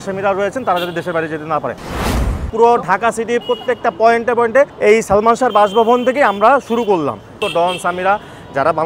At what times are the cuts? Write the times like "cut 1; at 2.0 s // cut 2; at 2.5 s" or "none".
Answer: cut 1; at 2.1 s // cut 2; at 4.7 s // cut 3; at 7.4 s